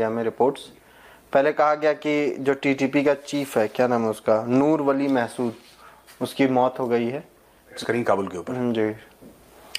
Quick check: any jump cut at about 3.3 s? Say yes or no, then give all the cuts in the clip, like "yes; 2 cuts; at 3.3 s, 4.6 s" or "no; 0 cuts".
no; 1 cut; at 7.8 s